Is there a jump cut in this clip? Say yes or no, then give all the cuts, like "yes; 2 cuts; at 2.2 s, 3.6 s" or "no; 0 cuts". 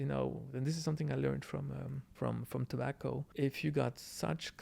yes; 2 cuts; at 2.0 s, 3.3 s